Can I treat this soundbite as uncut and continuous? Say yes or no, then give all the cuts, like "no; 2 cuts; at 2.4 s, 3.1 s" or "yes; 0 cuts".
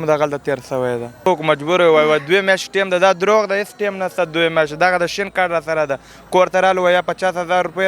no; 1 cut; at 1.3 s